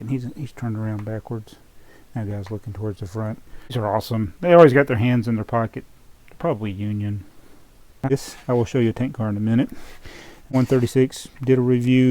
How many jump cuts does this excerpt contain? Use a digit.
3